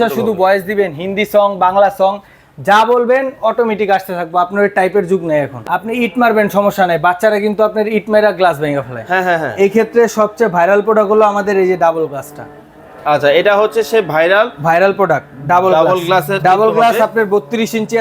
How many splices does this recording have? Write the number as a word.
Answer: one